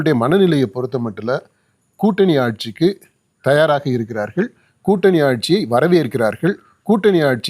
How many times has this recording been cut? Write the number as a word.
zero